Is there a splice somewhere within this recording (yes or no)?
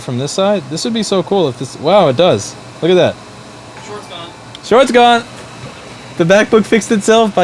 no